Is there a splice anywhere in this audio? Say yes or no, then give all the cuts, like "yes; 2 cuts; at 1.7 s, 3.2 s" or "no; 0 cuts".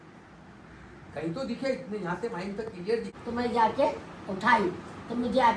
yes; 1 cut; at 3.1 s